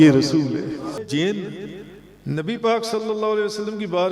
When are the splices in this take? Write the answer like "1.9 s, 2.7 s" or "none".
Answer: 1.0 s

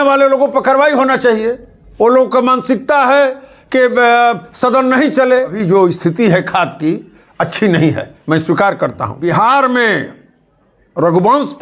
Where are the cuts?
5.6 s, 9.2 s

